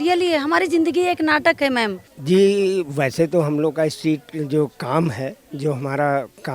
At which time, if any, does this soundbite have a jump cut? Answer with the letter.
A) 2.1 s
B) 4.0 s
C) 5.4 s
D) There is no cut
A